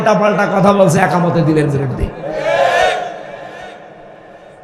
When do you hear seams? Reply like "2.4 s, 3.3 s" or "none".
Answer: none

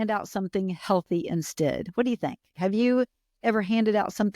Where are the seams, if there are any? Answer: 2.5 s

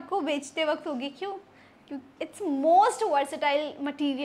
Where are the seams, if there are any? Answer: 2.0 s

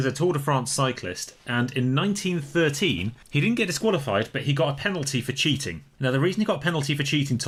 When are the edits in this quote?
none

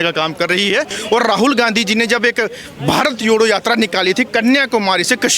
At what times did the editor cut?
1.0 s

